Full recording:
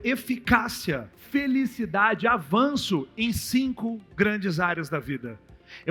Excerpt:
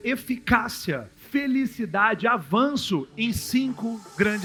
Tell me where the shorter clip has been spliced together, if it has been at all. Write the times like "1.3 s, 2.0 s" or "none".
none